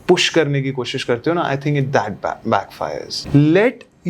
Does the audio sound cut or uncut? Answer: cut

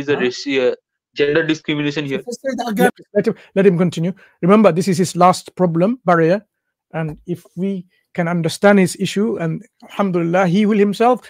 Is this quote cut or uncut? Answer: cut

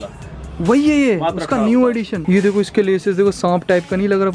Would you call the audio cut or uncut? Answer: cut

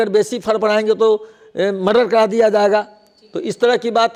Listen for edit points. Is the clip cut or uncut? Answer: uncut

